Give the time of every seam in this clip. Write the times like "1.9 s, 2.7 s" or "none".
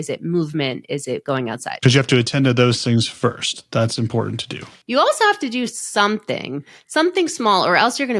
4.6 s